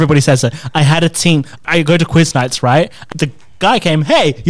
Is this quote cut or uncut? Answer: cut